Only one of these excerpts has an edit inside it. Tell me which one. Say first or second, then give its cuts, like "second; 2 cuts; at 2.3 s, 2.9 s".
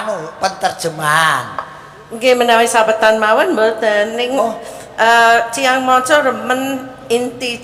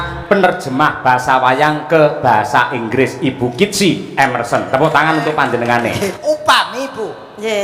second; 1 cut; at 6.2 s